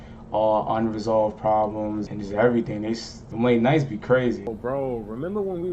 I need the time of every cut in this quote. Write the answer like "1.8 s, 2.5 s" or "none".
2.1 s, 3.2 s, 4.5 s